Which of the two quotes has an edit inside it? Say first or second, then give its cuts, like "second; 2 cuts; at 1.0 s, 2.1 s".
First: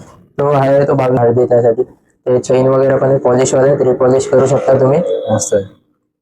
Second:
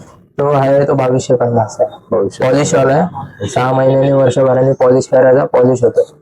first; 1 cut; at 1.2 s